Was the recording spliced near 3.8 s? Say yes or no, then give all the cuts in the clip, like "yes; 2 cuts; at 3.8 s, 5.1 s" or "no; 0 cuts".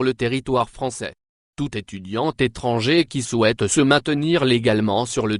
no; 1 cut; at 1.4 s